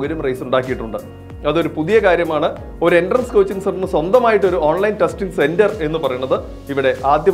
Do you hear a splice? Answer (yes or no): no